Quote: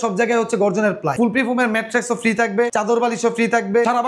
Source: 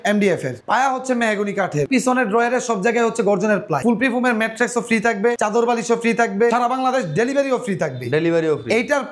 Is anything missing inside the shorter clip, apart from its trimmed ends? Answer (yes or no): no